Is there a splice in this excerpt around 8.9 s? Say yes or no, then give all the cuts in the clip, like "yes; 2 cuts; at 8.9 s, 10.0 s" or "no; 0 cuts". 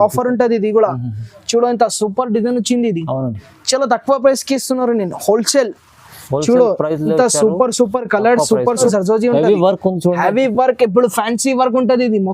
yes; 1 cut; at 8.9 s